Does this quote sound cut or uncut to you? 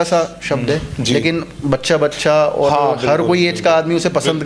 uncut